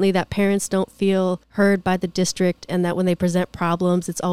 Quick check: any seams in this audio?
yes; 1 cut; at 1.4 s

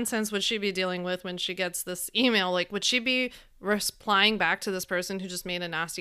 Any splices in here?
no; 0 cuts

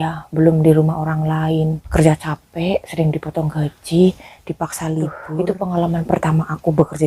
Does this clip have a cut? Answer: yes; 2 cuts; at 1.9 s, 5.1 s

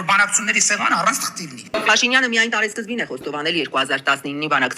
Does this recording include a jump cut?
yes; 1 cut; at 1.7 s

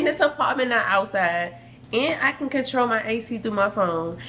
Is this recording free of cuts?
yes; 0 cuts

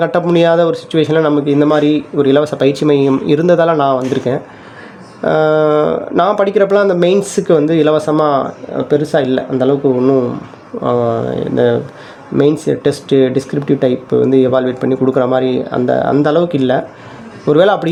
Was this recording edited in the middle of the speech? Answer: no; 0 cuts

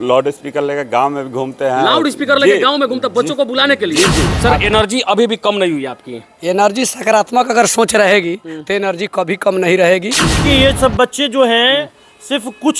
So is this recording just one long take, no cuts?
no; 2 cuts; at 4.3 s, 10.4 s

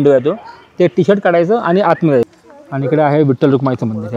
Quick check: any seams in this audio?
yes; 1 cut; at 2.3 s

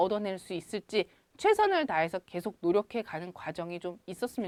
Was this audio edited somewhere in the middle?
no; 0 cuts

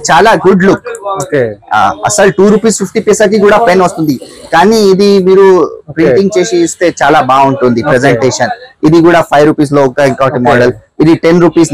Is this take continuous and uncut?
yes; 0 cuts

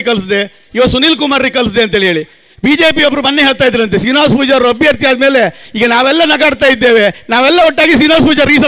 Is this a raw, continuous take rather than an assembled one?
yes; 0 cuts

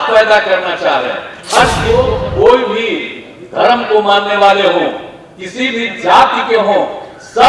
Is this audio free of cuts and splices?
no; 1 cut; at 1.8 s

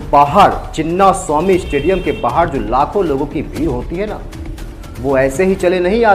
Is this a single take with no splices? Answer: yes; 0 cuts

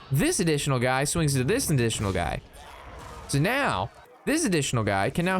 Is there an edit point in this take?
yes; 1 cut; at 4.1 s

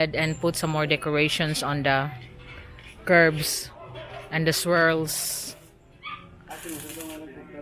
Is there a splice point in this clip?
yes; 1 cut; at 6.0 s

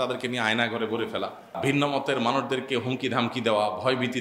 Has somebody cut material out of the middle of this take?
yes; 1 cut; at 1.6 s

